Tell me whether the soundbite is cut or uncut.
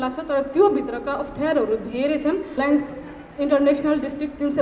cut